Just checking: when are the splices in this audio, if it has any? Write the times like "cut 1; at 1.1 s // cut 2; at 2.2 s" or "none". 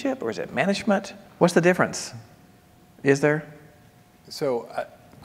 cut 1; at 1.2 s